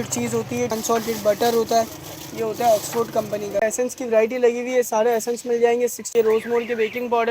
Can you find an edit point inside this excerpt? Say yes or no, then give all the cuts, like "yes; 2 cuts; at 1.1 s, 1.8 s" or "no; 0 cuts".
yes; 3 cuts; at 0.7 s, 3.6 s, 6.1 s